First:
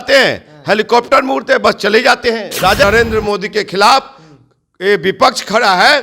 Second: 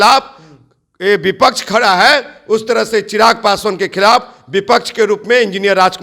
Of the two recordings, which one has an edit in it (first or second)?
first